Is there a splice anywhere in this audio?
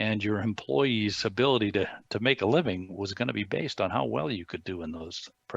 no; 0 cuts

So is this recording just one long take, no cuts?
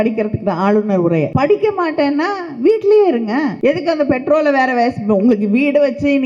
no; 2 cuts; at 1.3 s, 3.5 s

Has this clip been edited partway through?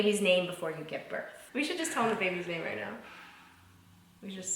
yes; 1 cut; at 1.3 s

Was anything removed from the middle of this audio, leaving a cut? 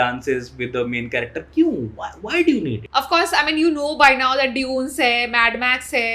yes; 1 cut; at 2.8 s

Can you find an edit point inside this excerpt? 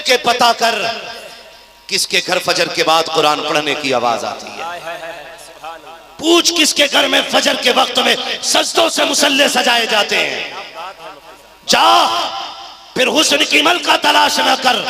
no; 0 cuts

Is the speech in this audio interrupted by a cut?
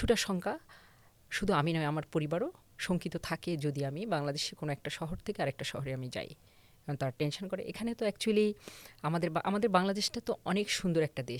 no; 0 cuts

